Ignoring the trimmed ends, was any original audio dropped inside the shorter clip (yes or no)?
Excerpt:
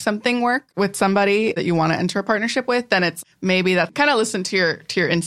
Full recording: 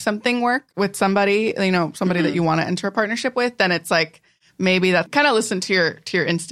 yes